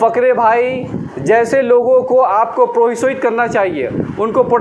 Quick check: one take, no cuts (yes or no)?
yes